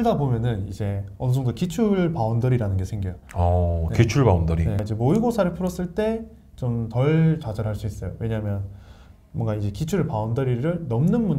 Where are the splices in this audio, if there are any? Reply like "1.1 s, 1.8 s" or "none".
none